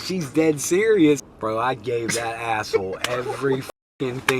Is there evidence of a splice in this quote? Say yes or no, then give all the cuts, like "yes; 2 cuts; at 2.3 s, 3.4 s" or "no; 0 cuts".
yes; 1 cut; at 1.2 s